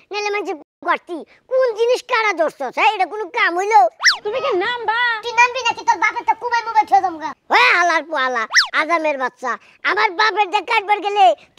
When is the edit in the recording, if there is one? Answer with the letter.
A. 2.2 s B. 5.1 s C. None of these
C